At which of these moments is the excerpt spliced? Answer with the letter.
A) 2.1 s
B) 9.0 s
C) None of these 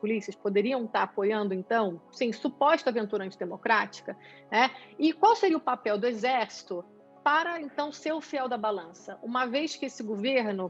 A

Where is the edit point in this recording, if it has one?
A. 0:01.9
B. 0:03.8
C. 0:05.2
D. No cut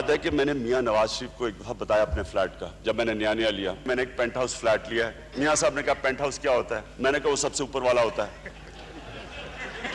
B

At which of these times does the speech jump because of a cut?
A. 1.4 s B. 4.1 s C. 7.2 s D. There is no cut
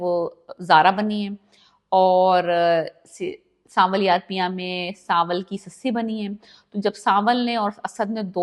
D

